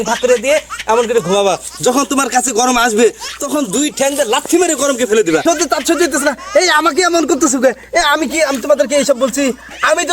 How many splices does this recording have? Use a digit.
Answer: 1